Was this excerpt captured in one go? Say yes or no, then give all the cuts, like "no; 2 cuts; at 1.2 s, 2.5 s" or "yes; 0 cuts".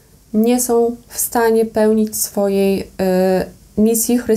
yes; 0 cuts